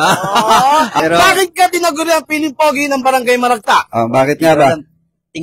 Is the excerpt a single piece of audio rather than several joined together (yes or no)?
no